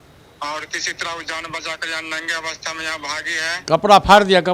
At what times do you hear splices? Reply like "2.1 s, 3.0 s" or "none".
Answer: none